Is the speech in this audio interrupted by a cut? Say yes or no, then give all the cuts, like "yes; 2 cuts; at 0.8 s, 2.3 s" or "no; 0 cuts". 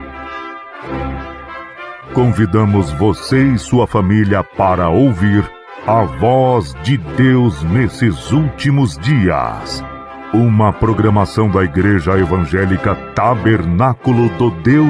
yes; 1 cut; at 2.0 s